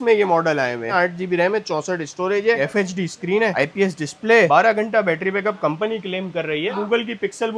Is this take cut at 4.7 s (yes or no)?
no